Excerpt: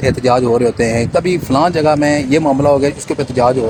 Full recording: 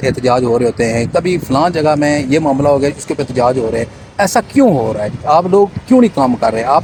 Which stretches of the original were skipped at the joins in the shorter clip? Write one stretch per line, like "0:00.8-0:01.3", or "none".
none